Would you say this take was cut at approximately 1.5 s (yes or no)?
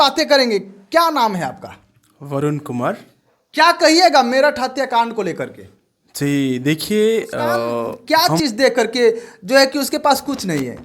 no